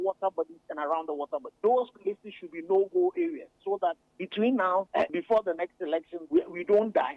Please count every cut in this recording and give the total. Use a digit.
3